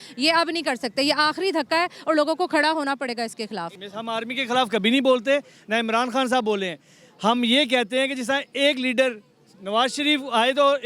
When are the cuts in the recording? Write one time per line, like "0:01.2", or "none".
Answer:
0:03.8